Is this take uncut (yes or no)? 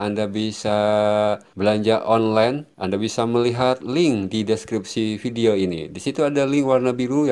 no